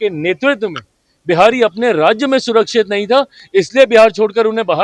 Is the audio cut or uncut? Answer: uncut